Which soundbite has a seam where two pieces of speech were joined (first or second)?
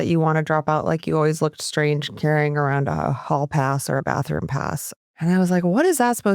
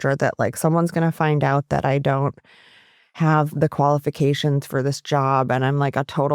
first